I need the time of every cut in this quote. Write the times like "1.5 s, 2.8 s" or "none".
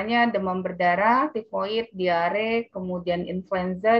none